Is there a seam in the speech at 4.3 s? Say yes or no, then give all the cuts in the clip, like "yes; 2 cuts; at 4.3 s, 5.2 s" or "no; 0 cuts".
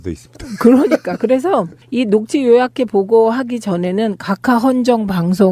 yes; 1 cut; at 4.3 s